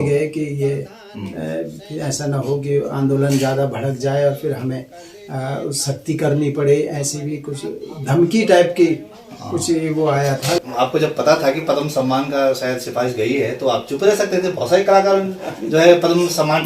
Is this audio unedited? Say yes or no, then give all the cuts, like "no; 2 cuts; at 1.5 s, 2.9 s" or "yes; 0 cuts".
no; 1 cut; at 10.6 s